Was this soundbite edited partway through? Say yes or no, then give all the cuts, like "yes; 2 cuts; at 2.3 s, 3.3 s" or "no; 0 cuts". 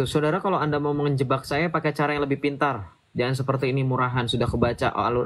no; 0 cuts